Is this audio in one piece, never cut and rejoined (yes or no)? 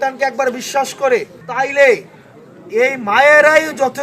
no